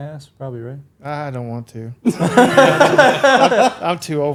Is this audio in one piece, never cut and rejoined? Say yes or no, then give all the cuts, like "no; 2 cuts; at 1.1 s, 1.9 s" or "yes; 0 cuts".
yes; 0 cuts